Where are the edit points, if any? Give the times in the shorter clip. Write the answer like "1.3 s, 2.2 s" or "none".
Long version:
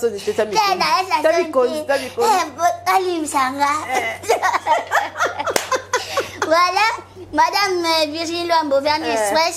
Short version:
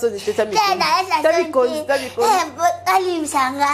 none